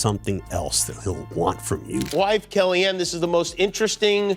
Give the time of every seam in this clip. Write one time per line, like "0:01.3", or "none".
0:02.1